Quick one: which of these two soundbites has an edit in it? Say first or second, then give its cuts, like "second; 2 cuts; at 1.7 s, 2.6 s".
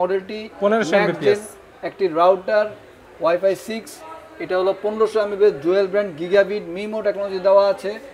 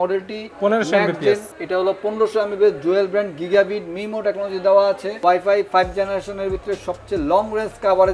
second; 2 cuts; at 1.5 s, 5.1 s